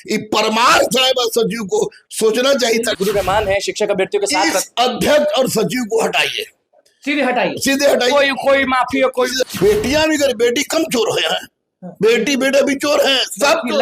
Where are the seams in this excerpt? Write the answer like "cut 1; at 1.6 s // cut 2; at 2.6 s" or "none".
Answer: cut 1; at 3.0 s // cut 2; at 9.4 s